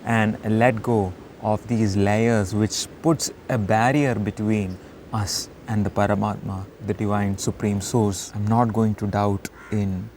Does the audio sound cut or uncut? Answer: cut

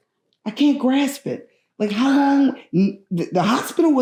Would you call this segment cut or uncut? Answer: uncut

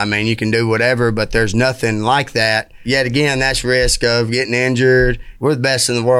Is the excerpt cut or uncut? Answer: cut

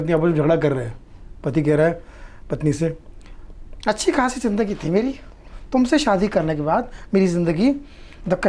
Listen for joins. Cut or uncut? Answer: uncut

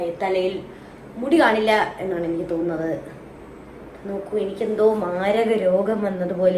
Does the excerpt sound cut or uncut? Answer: uncut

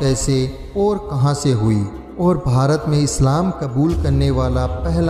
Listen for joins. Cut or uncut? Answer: uncut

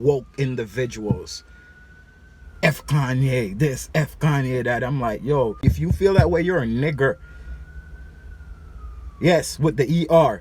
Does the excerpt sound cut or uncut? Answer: cut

